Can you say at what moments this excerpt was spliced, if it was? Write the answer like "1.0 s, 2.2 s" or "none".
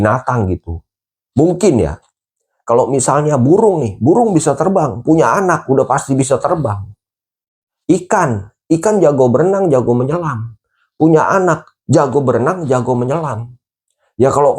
11.7 s

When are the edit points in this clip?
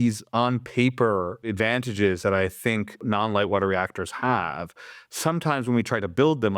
1.5 s, 3.0 s

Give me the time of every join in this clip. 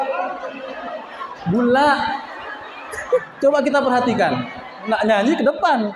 3.2 s, 4.9 s

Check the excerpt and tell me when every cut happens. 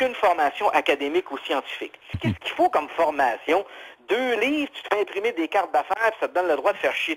2.1 s

